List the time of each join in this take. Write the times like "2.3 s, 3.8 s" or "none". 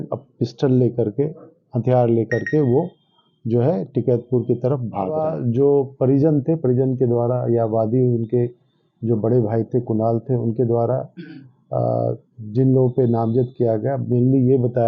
5.3 s